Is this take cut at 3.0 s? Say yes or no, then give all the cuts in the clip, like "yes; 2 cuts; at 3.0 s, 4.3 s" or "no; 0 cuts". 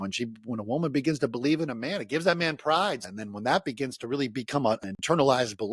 yes; 2 cuts; at 3.0 s, 4.8 s